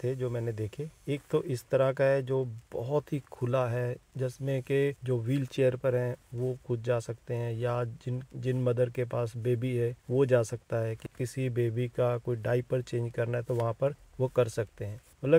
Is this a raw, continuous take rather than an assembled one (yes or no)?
yes